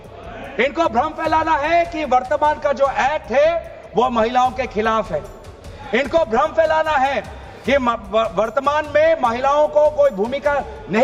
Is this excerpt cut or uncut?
uncut